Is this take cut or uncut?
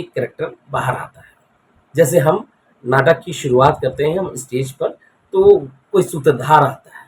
uncut